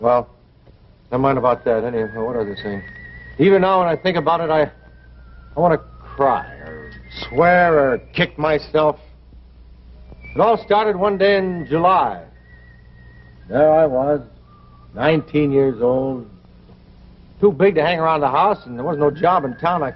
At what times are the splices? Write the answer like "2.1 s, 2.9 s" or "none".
5.4 s